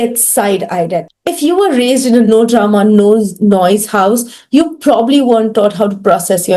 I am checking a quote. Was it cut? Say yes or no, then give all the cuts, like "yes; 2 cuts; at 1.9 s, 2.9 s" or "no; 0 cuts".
yes; 1 cut; at 1.1 s